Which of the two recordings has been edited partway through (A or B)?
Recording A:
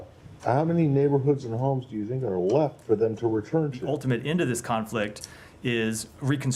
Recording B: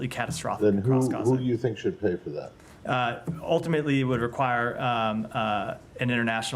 A